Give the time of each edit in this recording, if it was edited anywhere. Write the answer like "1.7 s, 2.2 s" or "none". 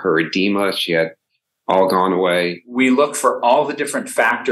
1.3 s, 2.7 s